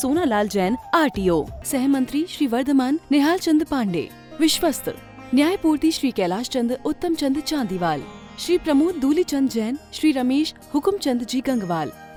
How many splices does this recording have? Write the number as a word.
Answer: zero